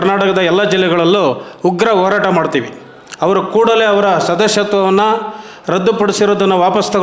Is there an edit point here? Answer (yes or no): no